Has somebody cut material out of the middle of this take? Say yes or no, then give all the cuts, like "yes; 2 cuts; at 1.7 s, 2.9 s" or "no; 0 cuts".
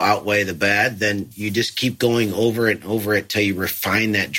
yes; 1 cut; at 1.3 s